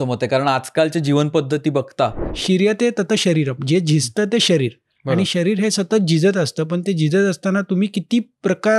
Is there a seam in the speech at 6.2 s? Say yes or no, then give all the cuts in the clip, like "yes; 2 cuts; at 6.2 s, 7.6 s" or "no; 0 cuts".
no; 1 cut; at 2.3 s